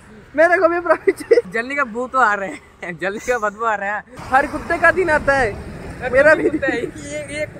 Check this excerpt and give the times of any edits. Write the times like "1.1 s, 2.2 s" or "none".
1.5 s, 4.1 s